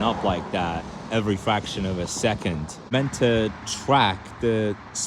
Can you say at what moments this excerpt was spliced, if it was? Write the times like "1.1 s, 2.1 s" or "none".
2.8 s